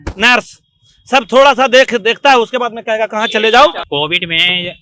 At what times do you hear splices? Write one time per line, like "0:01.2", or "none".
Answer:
0:03.8